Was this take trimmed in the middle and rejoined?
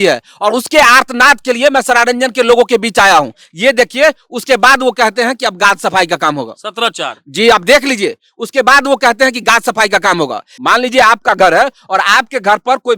yes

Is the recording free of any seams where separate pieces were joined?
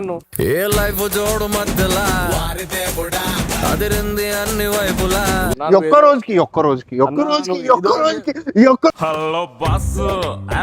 no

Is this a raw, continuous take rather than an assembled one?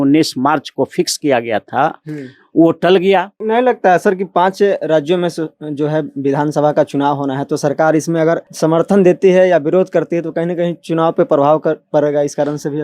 no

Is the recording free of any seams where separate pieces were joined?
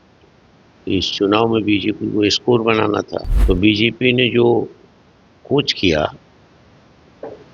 no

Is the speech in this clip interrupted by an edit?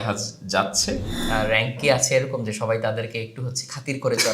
yes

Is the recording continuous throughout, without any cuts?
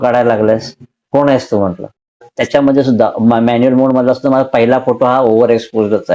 no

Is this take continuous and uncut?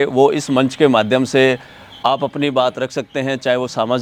yes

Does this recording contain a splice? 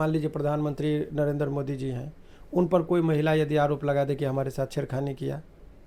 no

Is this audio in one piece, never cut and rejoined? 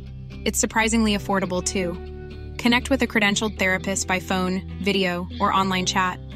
yes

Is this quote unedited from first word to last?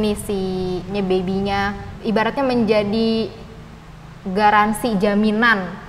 no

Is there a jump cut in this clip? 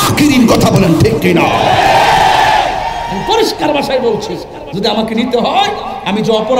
yes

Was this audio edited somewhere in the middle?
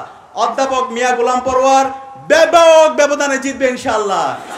no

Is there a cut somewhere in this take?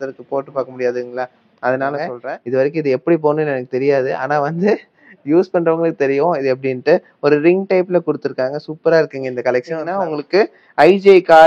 yes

